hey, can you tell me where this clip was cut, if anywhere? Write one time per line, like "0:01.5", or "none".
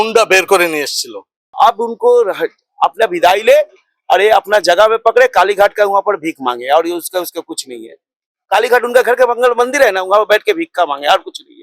0:01.5